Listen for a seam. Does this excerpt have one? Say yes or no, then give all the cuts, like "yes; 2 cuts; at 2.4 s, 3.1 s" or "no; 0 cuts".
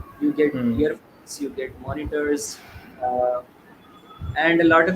no; 0 cuts